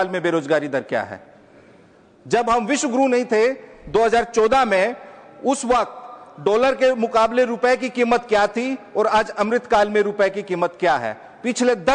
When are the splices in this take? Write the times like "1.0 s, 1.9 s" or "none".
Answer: none